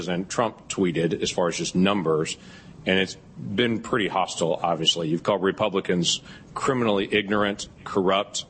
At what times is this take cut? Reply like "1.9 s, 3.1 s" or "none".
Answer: none